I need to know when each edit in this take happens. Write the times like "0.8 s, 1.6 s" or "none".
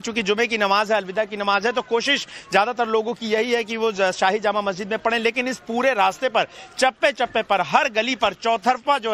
6.6 s